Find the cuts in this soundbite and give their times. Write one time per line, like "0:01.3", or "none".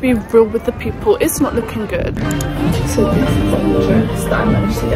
0:02.2

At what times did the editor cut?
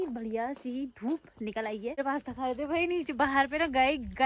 0:02.0

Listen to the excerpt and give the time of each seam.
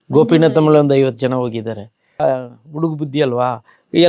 0:02.2

